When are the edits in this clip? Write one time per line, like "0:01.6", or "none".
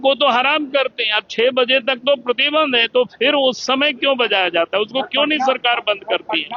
none

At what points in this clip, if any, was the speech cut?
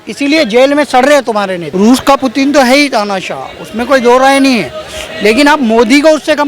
0:01.6

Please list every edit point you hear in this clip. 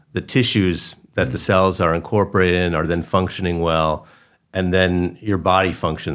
none

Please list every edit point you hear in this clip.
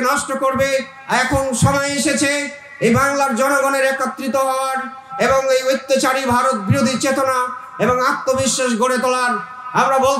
0:01.0

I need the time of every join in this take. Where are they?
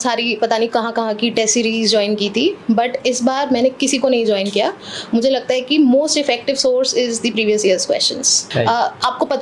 0:08.4

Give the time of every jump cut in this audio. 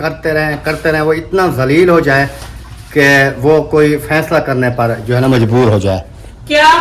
none

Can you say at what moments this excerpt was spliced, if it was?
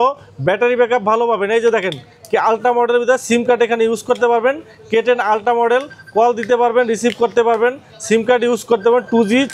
none

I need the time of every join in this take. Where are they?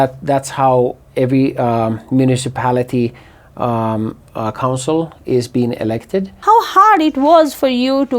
0:06.3

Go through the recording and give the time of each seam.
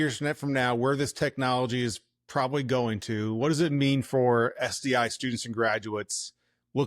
none

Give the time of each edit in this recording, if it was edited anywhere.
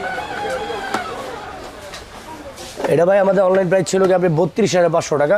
none

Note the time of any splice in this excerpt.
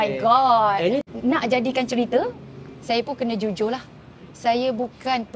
0:01.0

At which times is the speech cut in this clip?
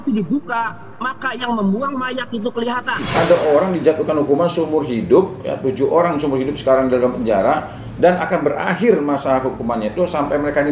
0:03.1

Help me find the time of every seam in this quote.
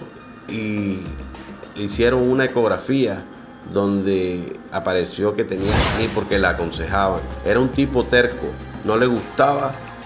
0:05.8

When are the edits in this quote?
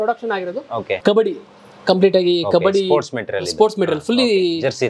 0:01.0

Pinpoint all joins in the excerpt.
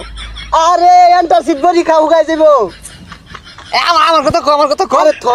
none

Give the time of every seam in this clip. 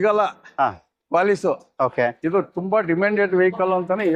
none

